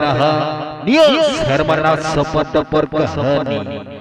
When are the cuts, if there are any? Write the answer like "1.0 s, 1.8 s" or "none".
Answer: none